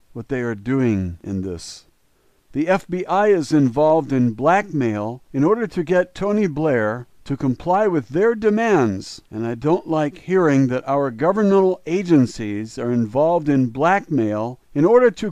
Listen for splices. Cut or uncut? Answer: cut